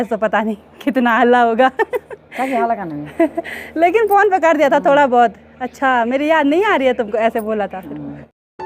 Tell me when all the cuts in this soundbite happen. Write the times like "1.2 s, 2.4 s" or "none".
none